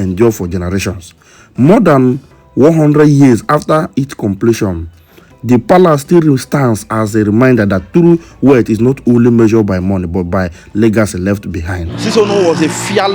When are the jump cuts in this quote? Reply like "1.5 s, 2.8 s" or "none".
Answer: 12.0 s